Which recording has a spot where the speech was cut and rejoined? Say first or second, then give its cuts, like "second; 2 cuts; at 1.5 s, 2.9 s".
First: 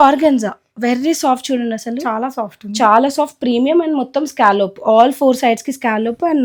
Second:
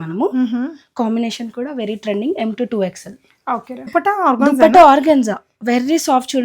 second; 1 cut; at 3.9 s